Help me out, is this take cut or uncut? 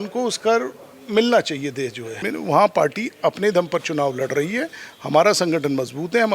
cut